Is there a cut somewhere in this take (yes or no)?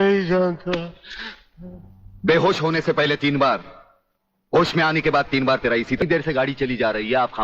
yes